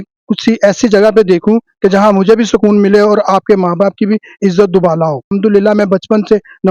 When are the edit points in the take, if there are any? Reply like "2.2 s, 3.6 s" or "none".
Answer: 5.3 s